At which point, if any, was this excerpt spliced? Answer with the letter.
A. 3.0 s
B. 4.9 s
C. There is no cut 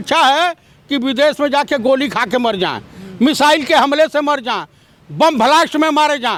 C